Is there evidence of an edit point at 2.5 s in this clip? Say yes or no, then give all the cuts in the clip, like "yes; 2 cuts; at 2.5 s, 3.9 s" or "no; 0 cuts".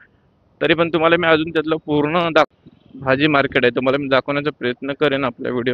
yes; 1 cut; at 2.5 s